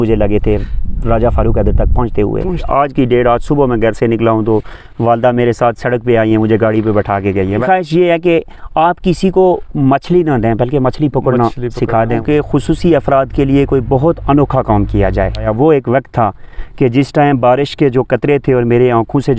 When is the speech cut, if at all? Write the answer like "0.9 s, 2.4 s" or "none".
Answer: 2.7 s, 7.6 s, 12.1 s, 15.5 s